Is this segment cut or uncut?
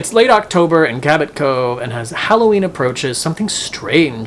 uncut